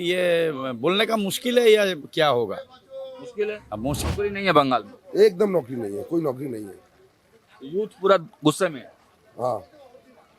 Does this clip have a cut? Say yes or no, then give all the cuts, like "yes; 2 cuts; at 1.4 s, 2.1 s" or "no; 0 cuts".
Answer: yes; 1 cut; at 4.0 s